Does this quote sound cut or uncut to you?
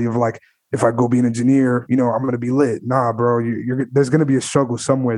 uncut